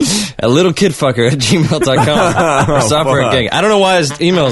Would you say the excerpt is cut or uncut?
uncut